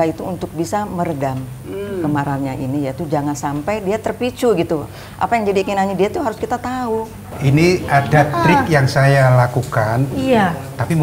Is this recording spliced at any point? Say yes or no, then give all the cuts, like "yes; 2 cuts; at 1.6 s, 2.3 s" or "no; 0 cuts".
yes; 1 cut; at 7.3 s